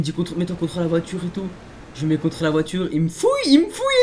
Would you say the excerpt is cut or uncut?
uncut